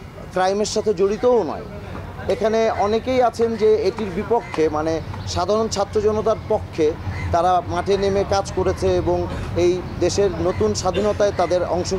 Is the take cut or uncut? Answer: uncut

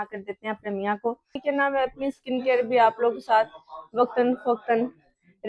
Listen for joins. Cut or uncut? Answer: cut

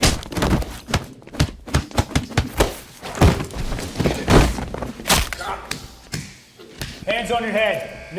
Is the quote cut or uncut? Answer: uncut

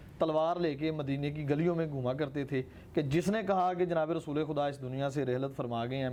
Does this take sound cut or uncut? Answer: uncut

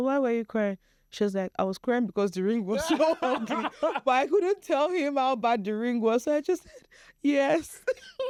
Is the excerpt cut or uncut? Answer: uncut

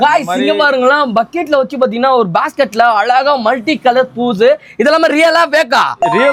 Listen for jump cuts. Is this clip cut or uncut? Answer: uncut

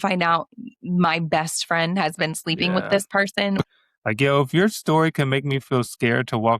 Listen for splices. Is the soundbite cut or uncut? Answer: cut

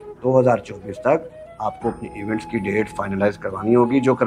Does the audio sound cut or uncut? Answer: uncut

